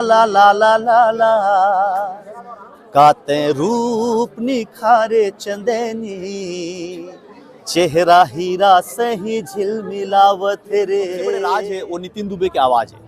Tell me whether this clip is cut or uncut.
cut